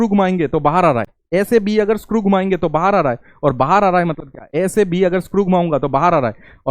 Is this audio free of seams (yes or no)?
no